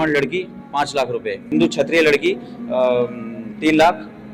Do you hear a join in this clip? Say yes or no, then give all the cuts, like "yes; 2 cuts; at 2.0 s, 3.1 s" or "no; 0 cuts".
yes; 1 cut; at 1.4 s